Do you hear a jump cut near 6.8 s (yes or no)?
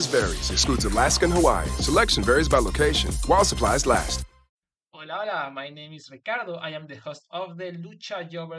no